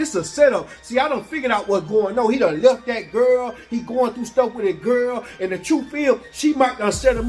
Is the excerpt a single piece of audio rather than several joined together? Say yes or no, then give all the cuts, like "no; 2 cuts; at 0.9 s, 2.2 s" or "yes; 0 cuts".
yes; 0 cuts